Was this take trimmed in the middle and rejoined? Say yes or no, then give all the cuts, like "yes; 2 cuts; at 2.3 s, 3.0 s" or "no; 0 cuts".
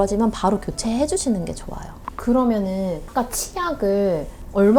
no; 0 cuts